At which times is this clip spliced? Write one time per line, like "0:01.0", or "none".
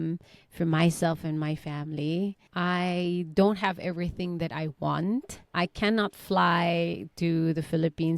0:02.4
0:05.4